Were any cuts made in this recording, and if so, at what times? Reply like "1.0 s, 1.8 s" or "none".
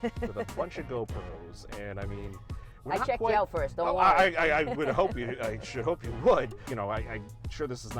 6.7 s